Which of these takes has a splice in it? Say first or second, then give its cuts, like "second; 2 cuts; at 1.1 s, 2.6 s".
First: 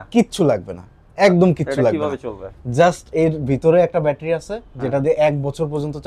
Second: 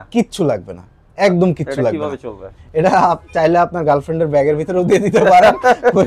second; 1 cut; at 2.5 s